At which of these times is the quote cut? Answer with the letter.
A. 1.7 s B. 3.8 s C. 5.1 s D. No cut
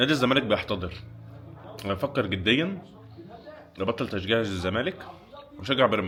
D